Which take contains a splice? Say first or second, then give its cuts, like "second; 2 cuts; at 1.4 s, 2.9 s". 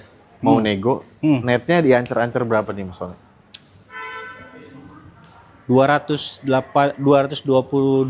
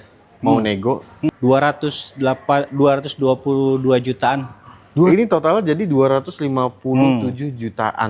second; 2 cuts; at 1.3 s, 5.1 s